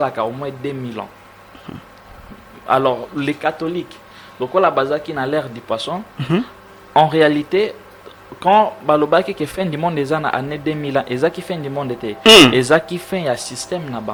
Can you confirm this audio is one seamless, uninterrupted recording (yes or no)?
yes